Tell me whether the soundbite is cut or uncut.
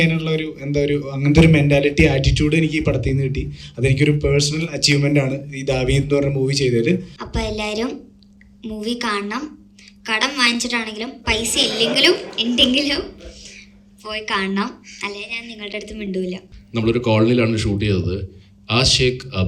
cut